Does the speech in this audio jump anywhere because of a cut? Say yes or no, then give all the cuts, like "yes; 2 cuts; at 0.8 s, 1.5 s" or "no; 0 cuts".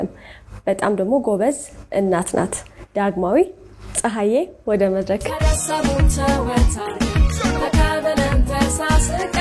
yes; 2 cuts; at 2.8 s, 5.3 s